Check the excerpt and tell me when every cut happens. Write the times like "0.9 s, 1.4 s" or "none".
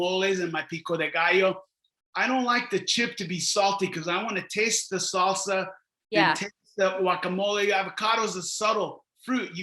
none